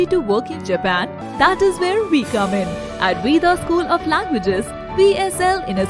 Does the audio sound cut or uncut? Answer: cut